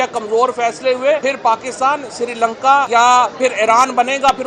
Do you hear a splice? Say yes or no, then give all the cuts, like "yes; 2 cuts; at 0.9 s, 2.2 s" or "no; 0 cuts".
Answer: yes; 2 cuts; at 1.2 s, 2.9 s